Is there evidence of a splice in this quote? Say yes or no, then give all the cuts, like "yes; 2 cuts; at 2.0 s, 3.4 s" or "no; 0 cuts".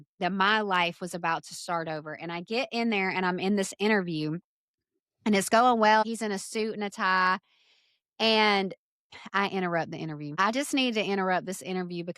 yes; 2 cuts; at 6.0 s, 10.4 s